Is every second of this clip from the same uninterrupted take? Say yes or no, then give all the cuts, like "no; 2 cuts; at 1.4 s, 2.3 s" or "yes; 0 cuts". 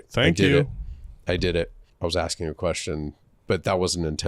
no; 1 cut; at 1.8 s